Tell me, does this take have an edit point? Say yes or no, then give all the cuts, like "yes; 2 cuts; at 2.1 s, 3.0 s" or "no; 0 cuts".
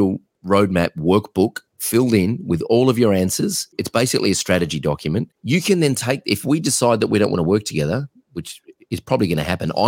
yes; 2 cuts; at 3.7 s, 5.3 s